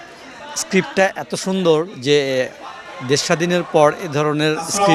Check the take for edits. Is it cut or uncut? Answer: uncut